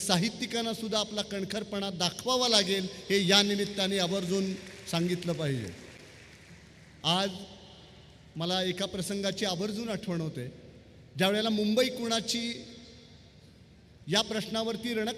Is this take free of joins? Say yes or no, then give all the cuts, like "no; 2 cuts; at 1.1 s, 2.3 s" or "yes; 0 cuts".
yes; 0 cuts